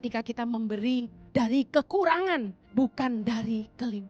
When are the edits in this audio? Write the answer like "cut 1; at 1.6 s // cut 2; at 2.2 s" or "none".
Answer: cut 1; at 2.6 s